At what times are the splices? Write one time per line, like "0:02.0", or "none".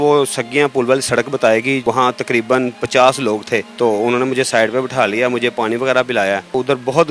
none